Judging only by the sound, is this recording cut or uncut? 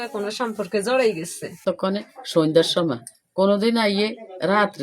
cut